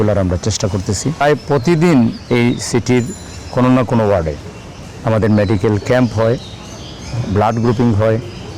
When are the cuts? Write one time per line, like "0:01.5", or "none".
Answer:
0:01.2